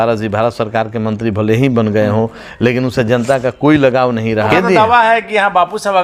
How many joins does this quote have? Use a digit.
1